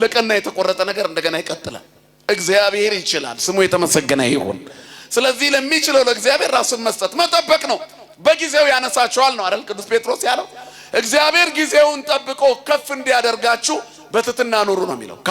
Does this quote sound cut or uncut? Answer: uncut